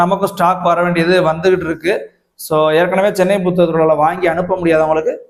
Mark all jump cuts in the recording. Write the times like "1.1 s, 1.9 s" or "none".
none